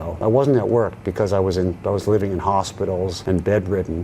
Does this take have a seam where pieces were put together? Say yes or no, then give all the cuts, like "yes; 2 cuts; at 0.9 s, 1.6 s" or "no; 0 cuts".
no; 0 cuts